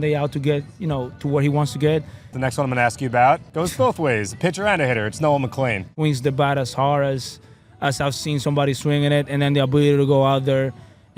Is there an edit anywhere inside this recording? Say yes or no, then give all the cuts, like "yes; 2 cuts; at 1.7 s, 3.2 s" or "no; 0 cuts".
yes; 3 cuts; at 2.3 s, 3.5 s, 5.9 s